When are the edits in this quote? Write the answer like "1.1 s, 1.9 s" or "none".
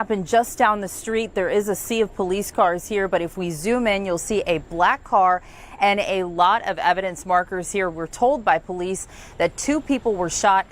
none